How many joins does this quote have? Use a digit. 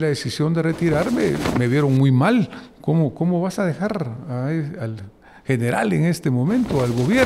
0